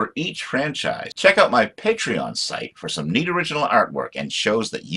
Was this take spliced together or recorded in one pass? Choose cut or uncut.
cut